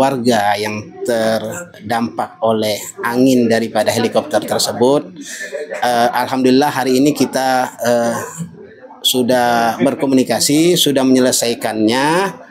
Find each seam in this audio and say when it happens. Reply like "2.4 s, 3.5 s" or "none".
none